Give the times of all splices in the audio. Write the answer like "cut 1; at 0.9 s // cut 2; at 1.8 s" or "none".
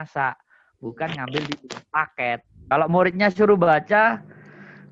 cut 1; at 2.6 s